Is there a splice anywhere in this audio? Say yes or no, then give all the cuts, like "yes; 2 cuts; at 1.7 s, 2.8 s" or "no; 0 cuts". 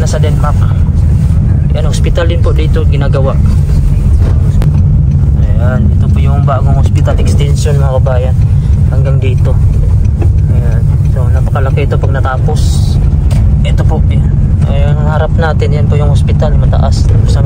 no; 0 cuts